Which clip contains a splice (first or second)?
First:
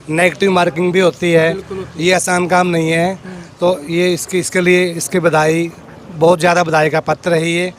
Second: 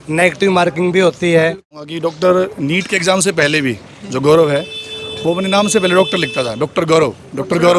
second